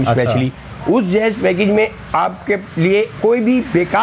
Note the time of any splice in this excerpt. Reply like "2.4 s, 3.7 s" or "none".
none